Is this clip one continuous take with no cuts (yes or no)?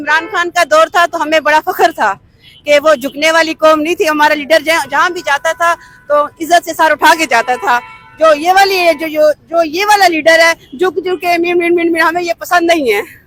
yes